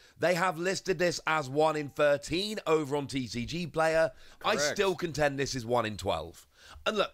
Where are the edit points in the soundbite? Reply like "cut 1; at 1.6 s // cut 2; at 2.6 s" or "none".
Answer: none